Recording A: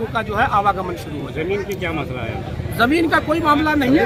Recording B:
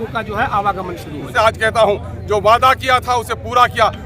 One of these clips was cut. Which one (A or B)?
B